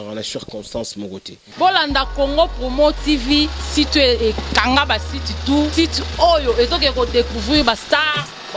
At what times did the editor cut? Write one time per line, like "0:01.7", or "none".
0:01.4

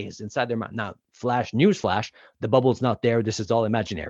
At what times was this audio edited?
0:01.0

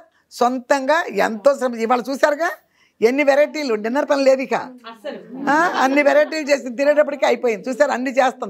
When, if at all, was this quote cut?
none

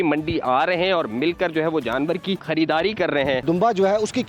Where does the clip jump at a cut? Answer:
0:02.4
0:03.4

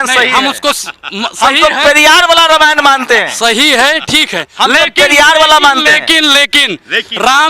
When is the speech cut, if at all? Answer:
none

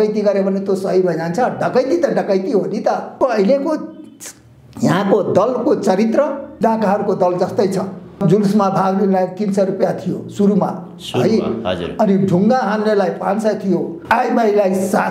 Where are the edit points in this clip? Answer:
0:03.2
0:06.6
0:08.2
0:14.0

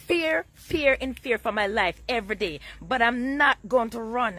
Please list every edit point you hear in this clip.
none

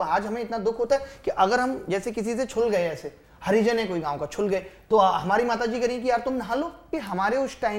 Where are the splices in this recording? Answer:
0:06.9

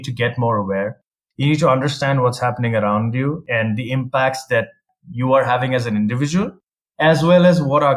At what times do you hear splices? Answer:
0:03.4

